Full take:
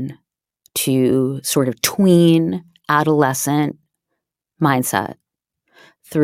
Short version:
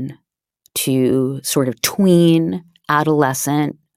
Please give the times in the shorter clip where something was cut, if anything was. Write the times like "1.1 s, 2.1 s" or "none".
none